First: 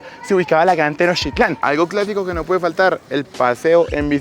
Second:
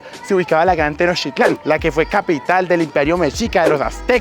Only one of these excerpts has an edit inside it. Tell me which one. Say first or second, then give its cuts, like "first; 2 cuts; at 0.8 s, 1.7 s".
first; 1 cut; at 1.4 s